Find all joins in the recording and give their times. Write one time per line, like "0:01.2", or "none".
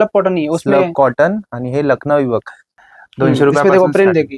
0:02.7